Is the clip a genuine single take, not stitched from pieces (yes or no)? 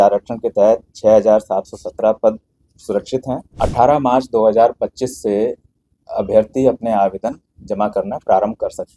no